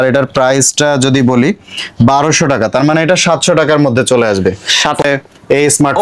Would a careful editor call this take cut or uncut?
cut